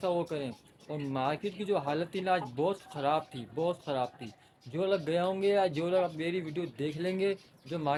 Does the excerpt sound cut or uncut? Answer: uncut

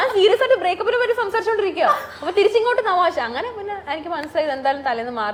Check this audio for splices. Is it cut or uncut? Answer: uncut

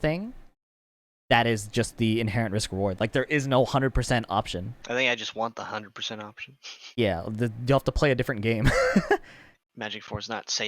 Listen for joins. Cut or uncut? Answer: cut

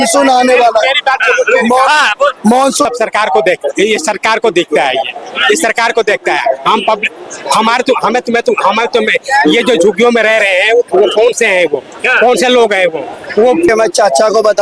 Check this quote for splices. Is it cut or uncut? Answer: cut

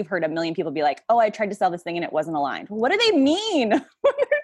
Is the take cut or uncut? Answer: uncut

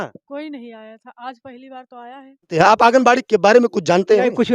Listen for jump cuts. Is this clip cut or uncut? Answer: cut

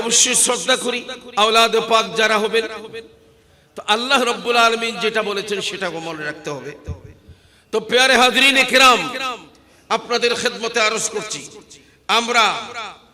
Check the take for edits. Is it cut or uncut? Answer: cut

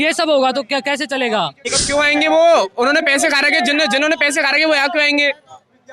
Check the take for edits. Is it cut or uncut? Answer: cut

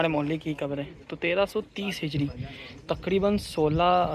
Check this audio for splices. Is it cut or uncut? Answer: uncut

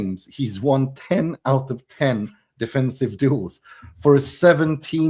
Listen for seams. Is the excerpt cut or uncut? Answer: uncut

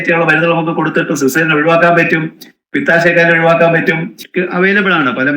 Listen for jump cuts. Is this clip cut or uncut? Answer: cut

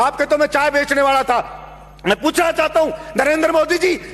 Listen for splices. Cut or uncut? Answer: uncut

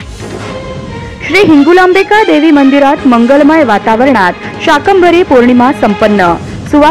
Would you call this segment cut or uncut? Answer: cut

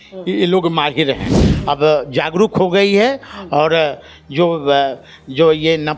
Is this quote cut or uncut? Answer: cut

